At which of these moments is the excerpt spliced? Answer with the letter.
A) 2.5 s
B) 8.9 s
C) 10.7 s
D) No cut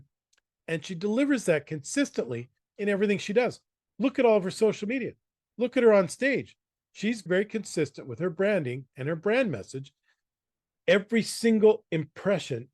C